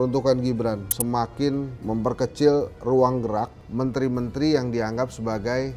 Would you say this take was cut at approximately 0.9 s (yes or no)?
yes